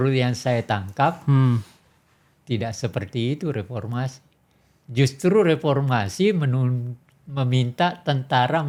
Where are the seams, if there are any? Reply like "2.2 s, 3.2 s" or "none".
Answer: none